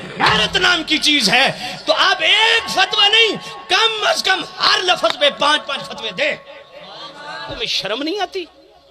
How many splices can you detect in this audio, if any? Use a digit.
1